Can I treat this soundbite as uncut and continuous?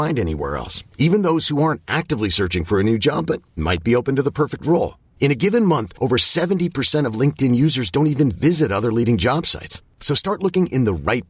yes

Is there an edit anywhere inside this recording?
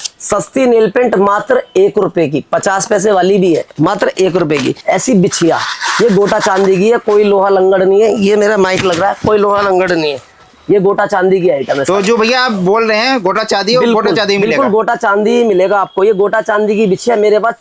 yes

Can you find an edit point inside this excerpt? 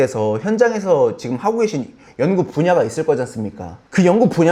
no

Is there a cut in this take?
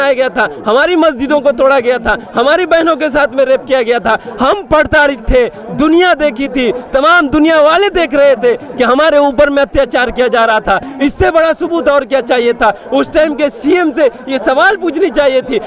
no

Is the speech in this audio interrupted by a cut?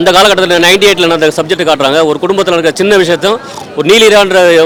no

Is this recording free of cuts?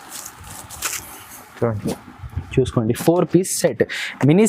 yes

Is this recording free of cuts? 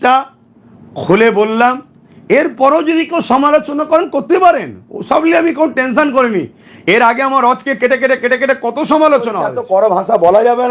no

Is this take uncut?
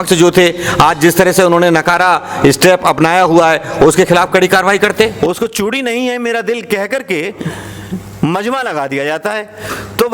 no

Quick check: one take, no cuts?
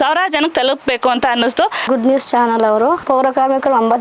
no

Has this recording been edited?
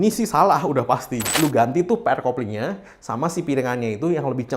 yes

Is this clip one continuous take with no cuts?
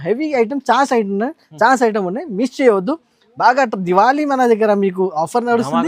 yes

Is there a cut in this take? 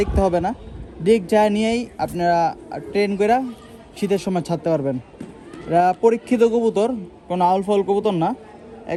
no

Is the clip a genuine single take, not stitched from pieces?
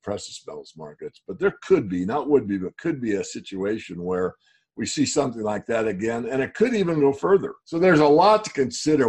no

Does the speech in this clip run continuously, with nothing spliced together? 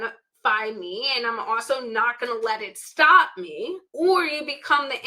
no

